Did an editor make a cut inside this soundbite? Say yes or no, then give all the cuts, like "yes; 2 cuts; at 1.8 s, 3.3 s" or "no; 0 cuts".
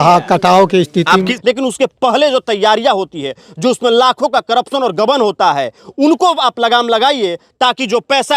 yes; 1 cut; at 1.3 s